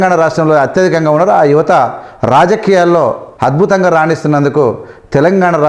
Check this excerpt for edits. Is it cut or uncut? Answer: cut